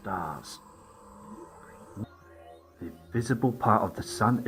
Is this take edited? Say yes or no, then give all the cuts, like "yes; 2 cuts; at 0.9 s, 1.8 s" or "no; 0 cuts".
no; 0 cuts